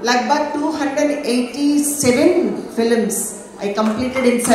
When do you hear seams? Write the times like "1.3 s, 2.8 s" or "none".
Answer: none